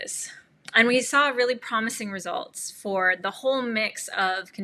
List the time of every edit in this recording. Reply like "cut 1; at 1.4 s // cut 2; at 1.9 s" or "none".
none